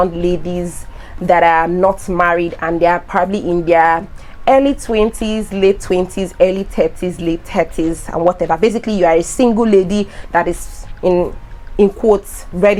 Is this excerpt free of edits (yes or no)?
yes